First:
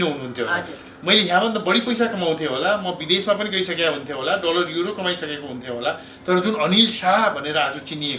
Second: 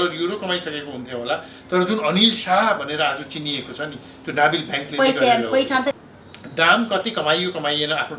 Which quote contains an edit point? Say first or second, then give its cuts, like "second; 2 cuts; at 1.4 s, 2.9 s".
second; 1 cut; at 5.9 s